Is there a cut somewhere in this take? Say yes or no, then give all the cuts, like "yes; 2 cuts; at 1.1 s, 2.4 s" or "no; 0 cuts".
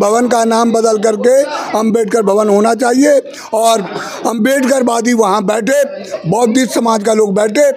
no; 0 cuts